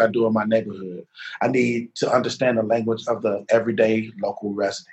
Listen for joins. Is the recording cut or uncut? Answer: uncut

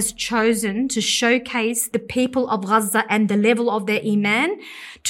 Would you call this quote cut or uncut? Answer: cut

